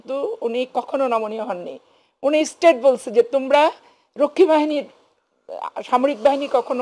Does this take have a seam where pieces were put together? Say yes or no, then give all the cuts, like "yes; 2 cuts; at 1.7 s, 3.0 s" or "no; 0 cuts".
no; 0 cuts